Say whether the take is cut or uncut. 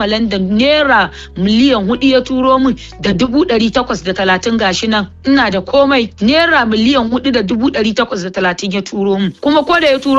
uncut